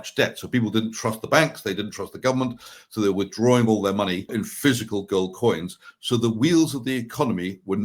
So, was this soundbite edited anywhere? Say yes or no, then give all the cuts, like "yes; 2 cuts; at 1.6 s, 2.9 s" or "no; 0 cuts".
yes; 1 cut; at 4.3 s